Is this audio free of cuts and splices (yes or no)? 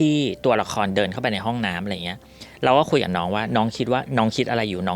yes